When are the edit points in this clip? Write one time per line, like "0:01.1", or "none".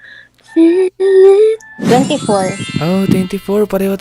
0:01.7